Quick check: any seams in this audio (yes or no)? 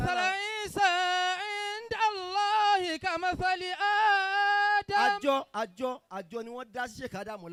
no